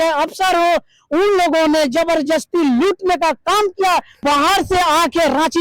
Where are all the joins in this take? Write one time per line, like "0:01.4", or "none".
0:04.2